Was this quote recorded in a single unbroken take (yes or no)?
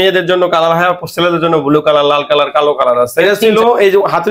no